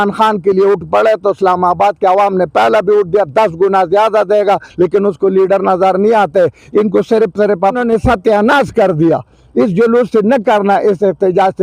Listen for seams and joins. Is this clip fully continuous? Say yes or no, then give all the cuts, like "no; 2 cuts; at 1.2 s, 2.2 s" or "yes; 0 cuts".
no; 1 cut; at 7.8 s